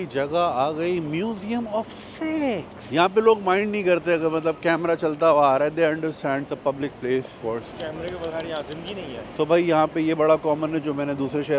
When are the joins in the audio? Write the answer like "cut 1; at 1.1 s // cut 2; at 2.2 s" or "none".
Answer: cut 1; at 2.8 s // cut 2; at 9.3 s

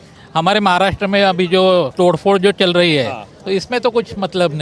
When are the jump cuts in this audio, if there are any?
cut 1; at 1.9 s

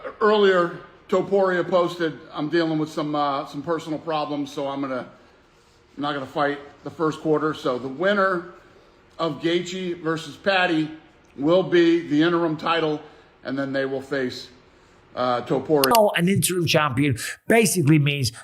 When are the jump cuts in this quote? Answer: cut 1; at 15.9 s

